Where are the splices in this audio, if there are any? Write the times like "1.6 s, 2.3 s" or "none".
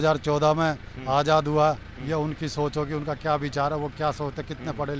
none